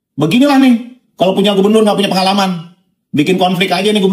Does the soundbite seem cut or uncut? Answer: uncut